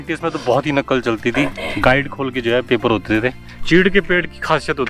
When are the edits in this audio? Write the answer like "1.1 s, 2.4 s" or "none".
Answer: 3.5 s